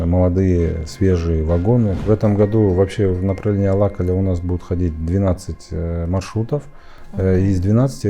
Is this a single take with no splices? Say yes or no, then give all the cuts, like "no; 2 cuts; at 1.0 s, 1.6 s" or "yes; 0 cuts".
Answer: no; 1 cut; at 2.0 s